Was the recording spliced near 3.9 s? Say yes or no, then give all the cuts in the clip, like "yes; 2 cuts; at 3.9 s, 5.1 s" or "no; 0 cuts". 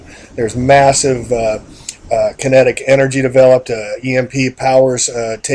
yes; 1 cut; at 3.9 s